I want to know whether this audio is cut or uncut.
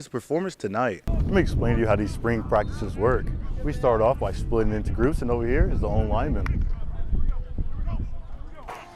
cut